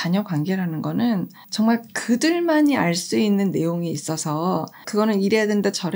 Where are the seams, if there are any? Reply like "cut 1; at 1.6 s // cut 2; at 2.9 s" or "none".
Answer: cut 1; at 1.4 s // cut 2; at 4.8 s